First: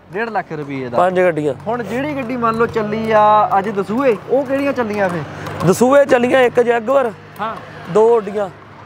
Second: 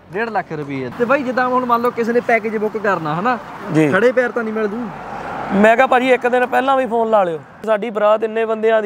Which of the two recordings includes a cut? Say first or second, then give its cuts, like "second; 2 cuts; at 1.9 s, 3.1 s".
second; 2 cuts; at 0.9 s, 7.6 s